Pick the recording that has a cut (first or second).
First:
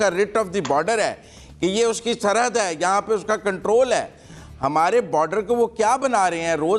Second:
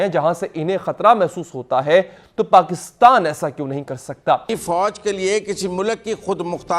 second